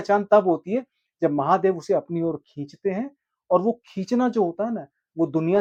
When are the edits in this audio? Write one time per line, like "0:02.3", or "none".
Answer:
none